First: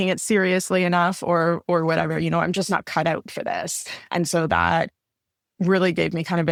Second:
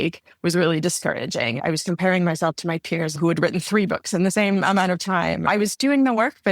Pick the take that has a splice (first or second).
second